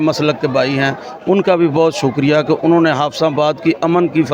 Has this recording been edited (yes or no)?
no